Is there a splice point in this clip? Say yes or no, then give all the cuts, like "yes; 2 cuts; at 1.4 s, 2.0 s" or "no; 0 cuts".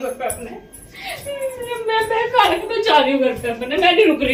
no; 0 cuts